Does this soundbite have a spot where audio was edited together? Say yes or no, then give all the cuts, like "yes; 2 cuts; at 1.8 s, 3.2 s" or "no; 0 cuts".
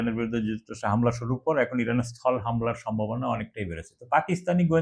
no; 0 cuts